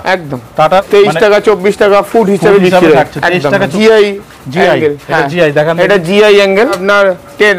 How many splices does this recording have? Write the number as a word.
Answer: three